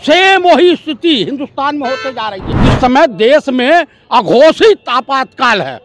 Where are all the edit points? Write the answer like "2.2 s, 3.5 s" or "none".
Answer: 2.5 s